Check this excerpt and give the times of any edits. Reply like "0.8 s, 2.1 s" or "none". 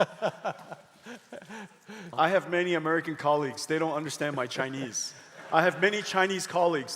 2.1 s